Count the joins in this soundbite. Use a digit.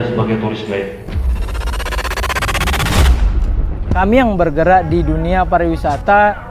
1